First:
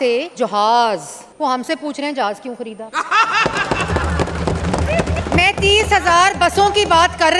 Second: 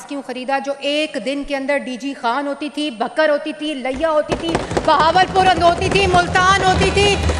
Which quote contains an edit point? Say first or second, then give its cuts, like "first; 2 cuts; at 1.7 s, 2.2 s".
first; 2 cuts; at 1.2 s, 5.2 s